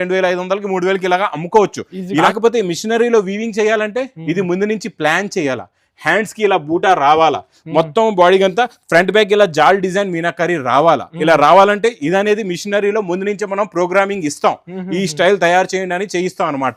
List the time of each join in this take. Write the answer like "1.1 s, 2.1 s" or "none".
2.2 s